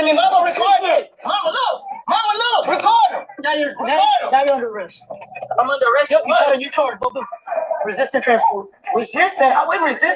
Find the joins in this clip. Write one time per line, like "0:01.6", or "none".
none